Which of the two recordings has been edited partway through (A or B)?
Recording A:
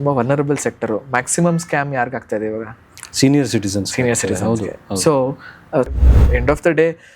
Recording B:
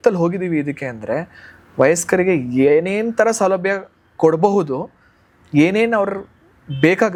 A